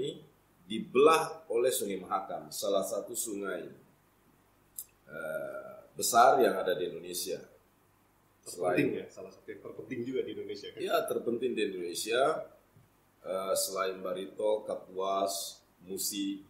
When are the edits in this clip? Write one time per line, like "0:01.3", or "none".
none